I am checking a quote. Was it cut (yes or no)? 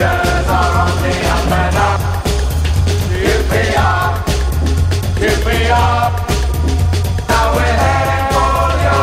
no